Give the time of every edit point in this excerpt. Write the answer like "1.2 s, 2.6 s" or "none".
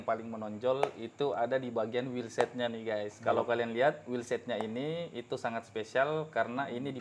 none

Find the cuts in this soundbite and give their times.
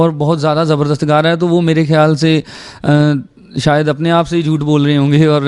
none

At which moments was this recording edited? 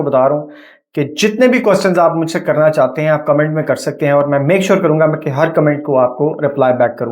none

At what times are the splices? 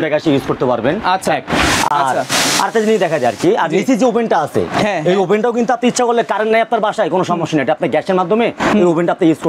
none

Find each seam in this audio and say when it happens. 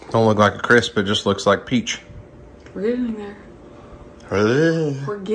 none

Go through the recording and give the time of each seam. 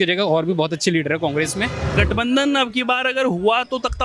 1.9 s

